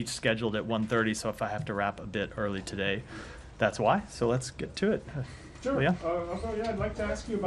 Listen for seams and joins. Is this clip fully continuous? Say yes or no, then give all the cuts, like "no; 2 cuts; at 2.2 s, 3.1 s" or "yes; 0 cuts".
no; 2 cuts; at 0.8 s, 5.9 s